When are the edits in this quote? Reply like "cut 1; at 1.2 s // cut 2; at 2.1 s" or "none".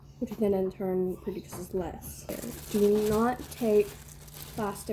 cut 1; at 2.3 s